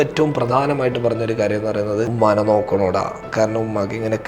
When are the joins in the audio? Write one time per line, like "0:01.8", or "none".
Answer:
0:02.1